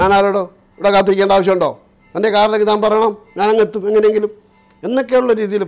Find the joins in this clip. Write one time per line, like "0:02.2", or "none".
none